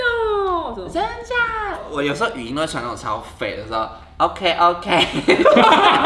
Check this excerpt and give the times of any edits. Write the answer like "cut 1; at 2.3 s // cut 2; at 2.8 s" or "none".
cut 1; at 1.9 s